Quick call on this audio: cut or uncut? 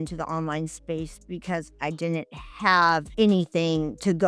cut